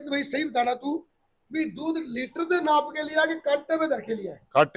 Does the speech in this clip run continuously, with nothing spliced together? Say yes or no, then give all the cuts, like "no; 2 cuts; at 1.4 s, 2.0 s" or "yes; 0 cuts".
yes; 0 cuts